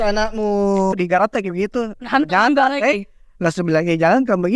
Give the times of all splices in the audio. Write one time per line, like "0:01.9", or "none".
0:01.0

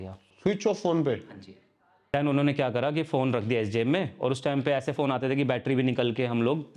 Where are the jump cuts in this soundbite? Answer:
0:02.1

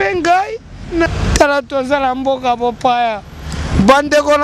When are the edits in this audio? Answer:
0:01.1

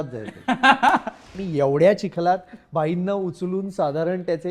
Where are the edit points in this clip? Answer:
0:01.3

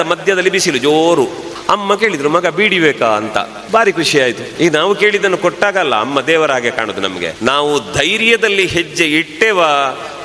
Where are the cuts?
0:01.5
0:03.6
0:04.5
0:07.3

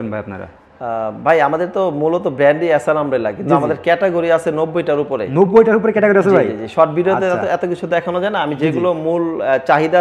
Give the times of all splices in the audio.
none

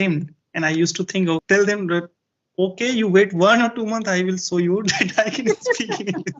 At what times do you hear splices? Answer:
0:01.4

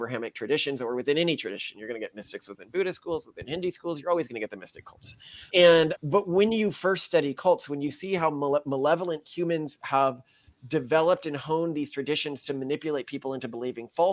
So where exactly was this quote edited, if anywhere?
none

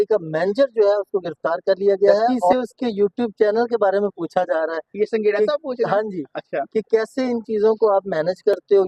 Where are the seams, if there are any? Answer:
0:02.5

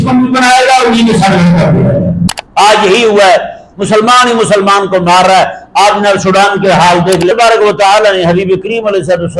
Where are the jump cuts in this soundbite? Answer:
0:02.4
0:07.3

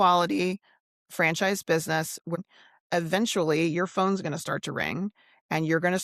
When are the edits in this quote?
0:02.4

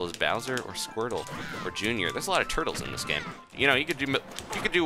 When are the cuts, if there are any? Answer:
0:03.5

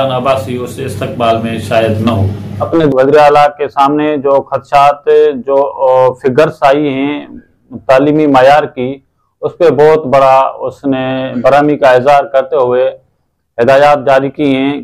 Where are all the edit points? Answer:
0:02.9

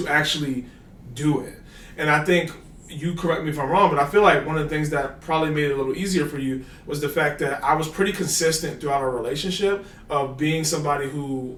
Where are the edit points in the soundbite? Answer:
none

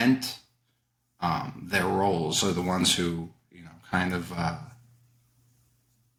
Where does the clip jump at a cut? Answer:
none

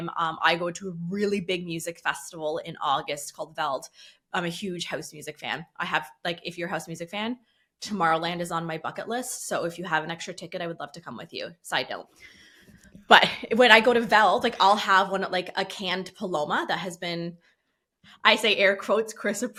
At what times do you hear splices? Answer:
none

